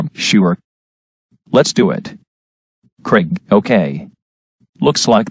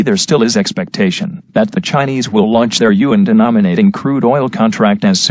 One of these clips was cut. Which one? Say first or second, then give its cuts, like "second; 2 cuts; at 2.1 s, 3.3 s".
first; 1 cut; at 2.7 s